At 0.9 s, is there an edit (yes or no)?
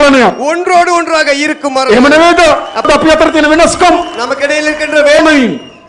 no